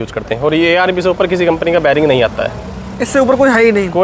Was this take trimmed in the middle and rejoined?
no; 0 cuts

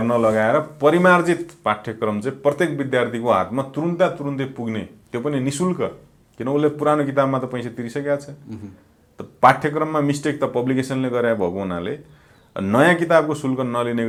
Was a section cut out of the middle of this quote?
no; 0 cuts

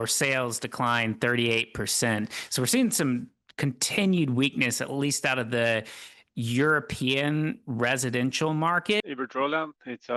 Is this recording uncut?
no; 1 cut; at 9.0 s

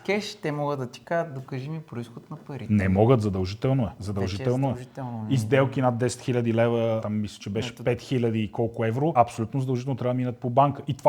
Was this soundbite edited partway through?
no; 0 cuts

